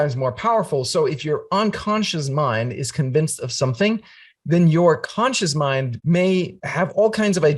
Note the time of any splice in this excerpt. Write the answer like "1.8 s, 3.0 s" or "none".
5.9 s, 6.6 s